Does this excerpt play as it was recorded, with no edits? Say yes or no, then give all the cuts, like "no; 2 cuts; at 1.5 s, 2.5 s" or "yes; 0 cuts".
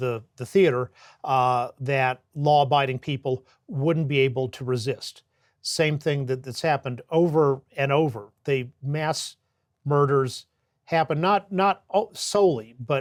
yes; 0 cuts